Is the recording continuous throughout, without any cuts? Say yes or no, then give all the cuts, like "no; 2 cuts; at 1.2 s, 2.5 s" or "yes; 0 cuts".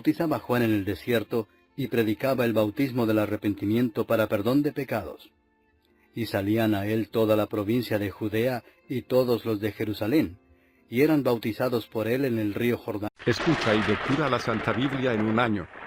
yes; 0 cuts